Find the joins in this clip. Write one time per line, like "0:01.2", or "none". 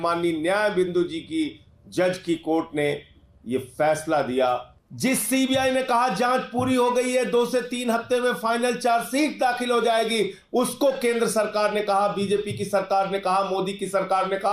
0:04.7